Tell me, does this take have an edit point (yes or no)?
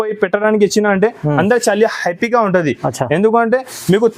no